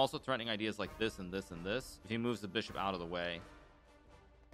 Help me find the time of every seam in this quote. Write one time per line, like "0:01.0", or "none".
0:01.9